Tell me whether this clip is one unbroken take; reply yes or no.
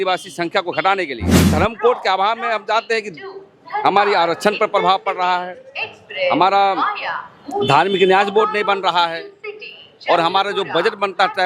no